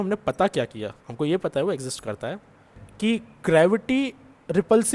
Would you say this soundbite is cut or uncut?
cut